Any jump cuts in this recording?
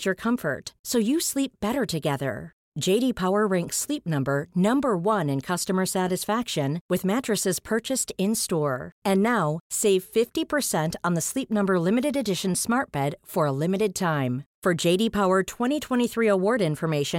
no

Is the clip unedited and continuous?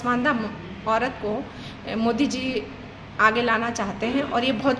yes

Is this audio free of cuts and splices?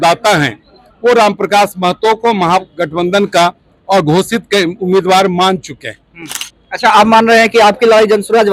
yes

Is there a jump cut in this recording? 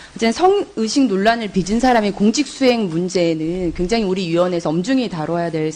no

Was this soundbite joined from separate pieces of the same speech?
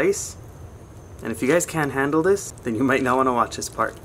yes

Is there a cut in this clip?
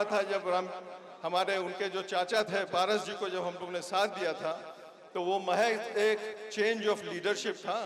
no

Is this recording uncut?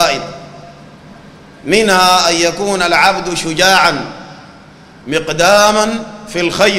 yes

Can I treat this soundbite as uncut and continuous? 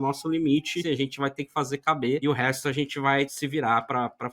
no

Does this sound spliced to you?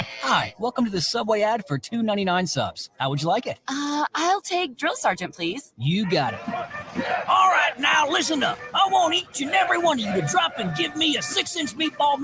no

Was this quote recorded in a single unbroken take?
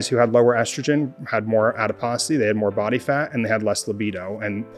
yes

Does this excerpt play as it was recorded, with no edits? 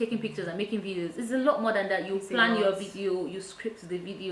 yes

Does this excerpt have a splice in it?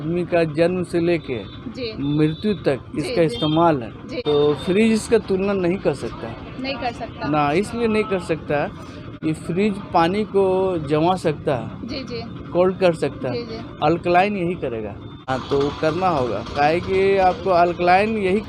yes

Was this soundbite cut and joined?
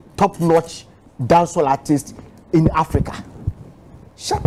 no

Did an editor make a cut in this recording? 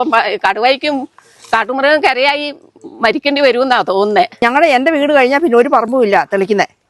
yes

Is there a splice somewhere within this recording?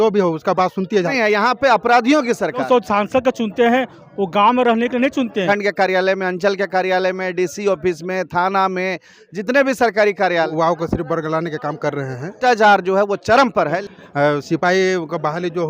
yes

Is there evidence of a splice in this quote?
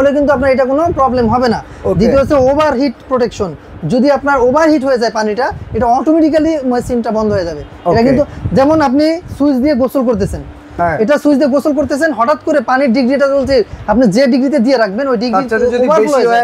no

